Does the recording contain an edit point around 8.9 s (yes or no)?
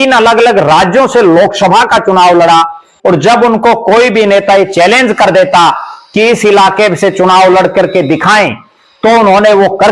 no